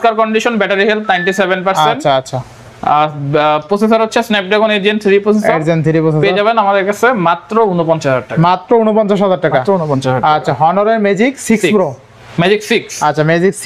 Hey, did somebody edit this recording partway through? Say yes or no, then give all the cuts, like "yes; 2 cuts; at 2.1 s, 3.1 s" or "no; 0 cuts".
no; 0 cuts